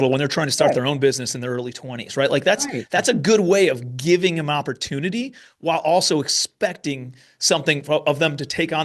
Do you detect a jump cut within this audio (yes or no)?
no